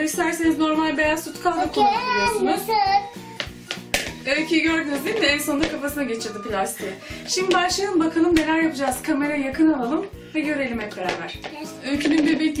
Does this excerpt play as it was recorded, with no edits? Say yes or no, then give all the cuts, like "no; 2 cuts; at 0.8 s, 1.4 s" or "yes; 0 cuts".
yes; 0 cuts